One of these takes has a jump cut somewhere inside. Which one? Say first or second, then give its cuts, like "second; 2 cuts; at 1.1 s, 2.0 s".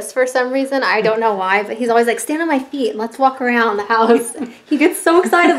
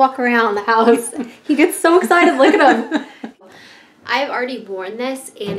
second; 1 cut; at 3.3 s